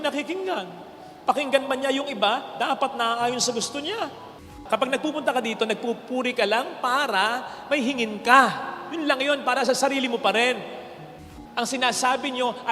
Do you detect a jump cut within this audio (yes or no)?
yes